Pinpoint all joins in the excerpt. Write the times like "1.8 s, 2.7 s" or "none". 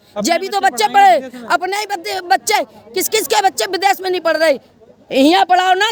none